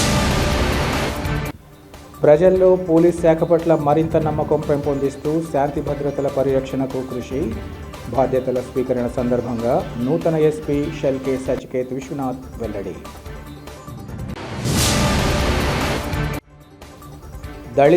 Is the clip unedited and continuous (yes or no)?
no